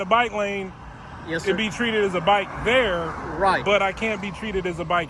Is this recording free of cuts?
yes; 0 cuts

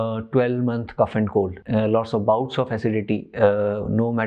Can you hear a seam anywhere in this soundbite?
yes; 1 cut; at 1.6 s

